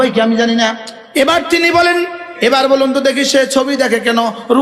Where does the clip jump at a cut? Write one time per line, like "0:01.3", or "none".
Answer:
0:01.2
0:02.2